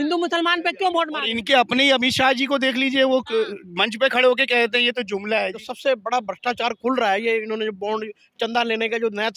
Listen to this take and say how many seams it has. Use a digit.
2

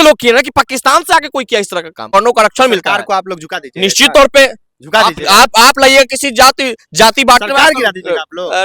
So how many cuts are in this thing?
1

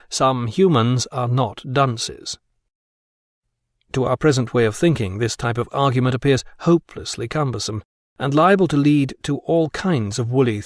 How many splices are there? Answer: 1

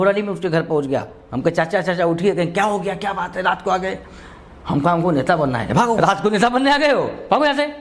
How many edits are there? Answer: 1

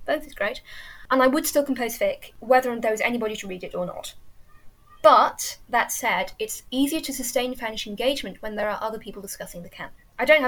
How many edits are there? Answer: 0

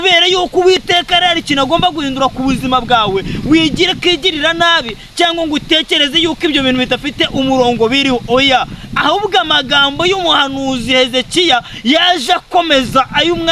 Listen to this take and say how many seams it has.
0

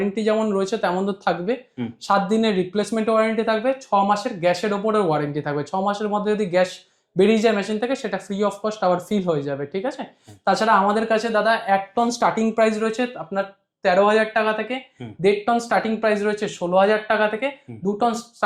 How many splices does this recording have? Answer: 0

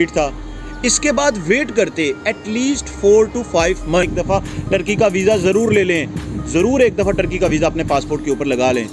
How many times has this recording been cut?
1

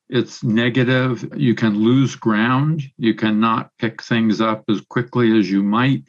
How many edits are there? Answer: 1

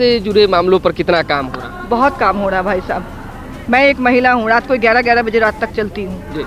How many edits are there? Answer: 0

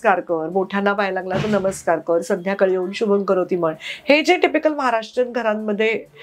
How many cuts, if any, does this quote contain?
0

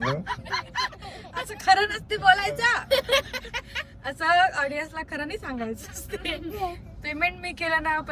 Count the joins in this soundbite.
0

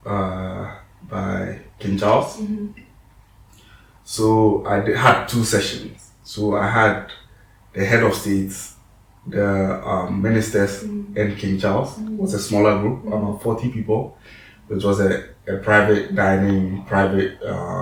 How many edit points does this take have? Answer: 0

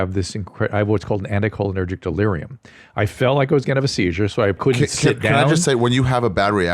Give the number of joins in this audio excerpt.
1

